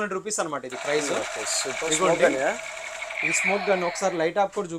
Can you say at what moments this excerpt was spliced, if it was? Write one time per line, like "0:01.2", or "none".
none